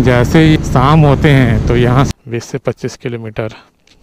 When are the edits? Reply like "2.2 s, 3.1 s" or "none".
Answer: 2.1 s